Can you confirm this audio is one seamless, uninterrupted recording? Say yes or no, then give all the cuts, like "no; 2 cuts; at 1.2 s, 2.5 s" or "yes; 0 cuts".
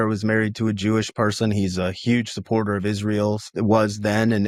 yes; 0 cuts